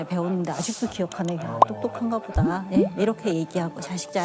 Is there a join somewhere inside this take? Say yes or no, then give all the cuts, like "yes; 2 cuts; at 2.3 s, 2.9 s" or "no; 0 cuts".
no; 0 cuts